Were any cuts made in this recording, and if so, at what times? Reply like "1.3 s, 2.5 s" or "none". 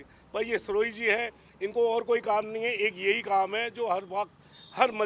none